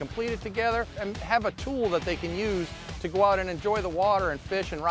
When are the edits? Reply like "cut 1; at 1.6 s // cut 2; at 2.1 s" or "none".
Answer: cut 1; at 1.0 s